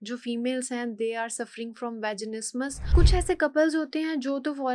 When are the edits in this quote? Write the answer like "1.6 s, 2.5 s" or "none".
2.9 s